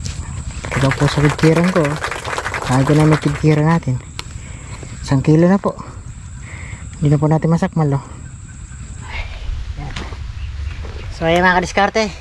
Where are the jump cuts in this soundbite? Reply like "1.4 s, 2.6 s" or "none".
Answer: 9.0 s